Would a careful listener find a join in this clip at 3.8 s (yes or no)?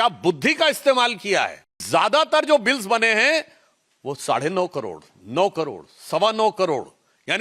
no